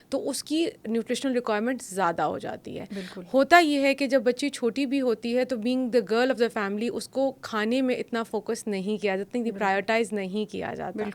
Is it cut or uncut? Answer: uncut